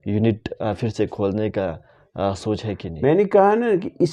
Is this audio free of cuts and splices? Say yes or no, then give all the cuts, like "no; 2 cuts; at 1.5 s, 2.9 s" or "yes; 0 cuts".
yes; 0 cuts